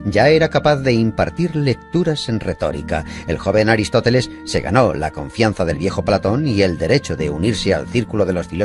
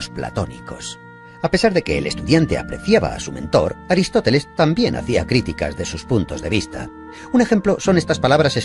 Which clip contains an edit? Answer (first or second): first